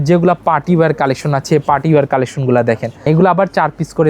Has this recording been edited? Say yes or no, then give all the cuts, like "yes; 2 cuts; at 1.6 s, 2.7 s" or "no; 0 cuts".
yes; 1 cut; at 3.0 s